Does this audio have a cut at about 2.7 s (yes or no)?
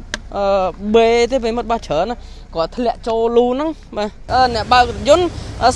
no